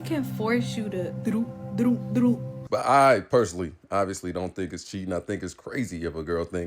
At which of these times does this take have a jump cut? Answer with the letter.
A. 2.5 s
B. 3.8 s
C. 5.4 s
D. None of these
A